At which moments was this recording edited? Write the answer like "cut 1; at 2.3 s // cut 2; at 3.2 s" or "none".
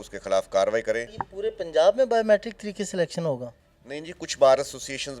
cut 1; at 1.2 s